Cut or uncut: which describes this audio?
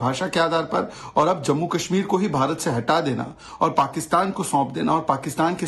uncut